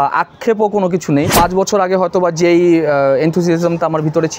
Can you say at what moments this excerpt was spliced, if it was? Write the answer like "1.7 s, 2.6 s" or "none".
1.3 s